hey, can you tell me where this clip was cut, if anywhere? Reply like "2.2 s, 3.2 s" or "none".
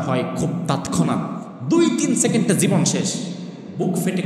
1.5 s